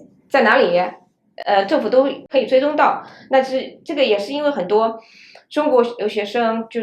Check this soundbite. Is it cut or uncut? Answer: cut